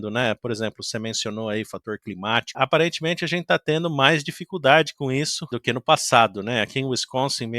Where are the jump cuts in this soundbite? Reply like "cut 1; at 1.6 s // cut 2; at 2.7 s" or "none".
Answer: cut 1; at 2.5 s // cut 2; at 5.6 s